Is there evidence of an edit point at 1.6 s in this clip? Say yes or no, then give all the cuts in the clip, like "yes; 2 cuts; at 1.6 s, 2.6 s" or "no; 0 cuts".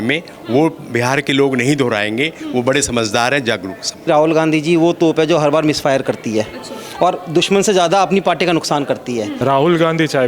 no; 2 cuts; at 4.1 s, 9.3 s